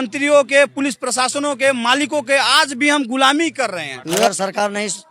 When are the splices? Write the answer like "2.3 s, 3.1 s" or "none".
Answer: 4.0 s